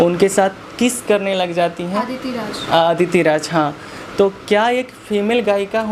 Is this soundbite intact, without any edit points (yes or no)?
yes